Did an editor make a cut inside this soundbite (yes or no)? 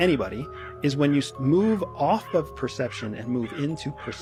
no